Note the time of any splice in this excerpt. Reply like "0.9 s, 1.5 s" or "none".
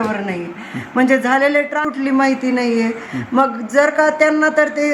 1.8 s